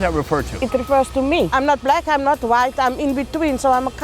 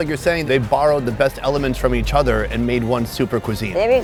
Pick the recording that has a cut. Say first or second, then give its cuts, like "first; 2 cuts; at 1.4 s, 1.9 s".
first; 1 cut; at 1.5 s